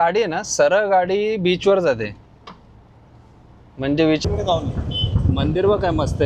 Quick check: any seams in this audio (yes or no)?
yes